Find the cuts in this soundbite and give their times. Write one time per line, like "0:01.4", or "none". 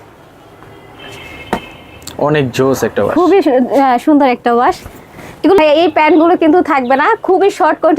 0:05.6